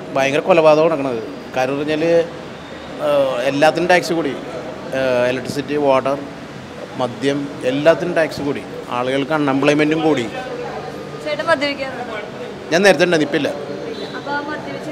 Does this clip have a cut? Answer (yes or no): no